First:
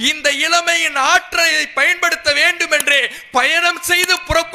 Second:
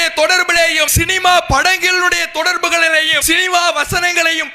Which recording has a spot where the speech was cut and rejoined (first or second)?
second